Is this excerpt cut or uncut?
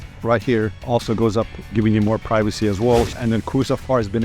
cut